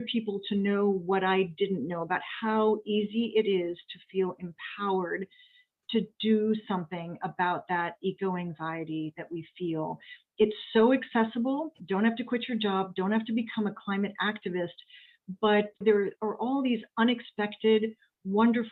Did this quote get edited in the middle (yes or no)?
yes